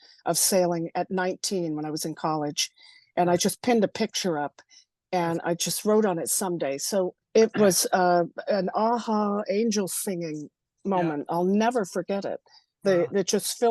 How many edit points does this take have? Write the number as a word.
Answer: one